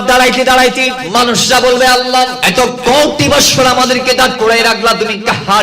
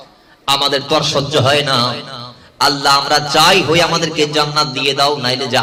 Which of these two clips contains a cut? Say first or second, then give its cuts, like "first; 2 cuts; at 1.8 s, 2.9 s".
first; 2 cuts; at 1.0 s, 2.4 s